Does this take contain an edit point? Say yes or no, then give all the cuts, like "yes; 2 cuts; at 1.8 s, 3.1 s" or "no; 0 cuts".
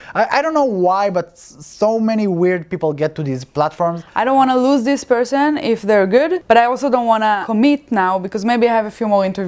yes; 3 cuts; at 4.1 s, 6.4 s, 7.4 s